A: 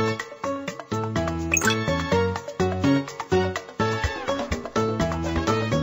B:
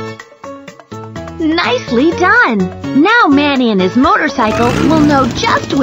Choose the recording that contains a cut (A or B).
B